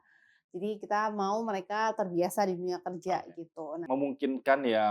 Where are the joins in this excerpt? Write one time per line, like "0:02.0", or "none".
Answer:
0:03.7